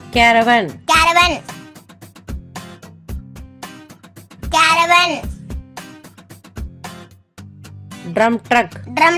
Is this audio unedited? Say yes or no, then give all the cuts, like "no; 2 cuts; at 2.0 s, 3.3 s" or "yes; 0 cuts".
yes; 0 cuts